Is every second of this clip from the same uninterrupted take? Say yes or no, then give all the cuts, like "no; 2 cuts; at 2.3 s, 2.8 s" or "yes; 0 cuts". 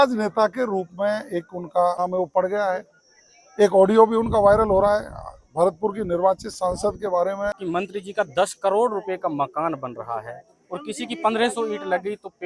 no; 2 cuts; at 2.0 s, 7.6 s